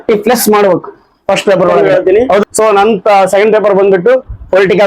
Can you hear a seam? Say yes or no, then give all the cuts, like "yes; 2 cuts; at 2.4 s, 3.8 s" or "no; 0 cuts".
yes; 1 cut; at 1.8 s